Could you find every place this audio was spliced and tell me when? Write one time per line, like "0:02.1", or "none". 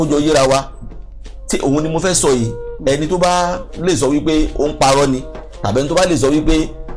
none